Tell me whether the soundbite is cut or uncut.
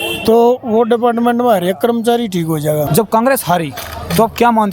cut